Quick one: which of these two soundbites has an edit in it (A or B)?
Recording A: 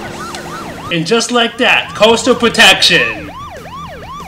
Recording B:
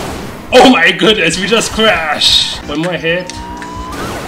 B